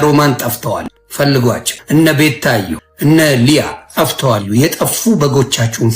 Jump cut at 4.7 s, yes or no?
no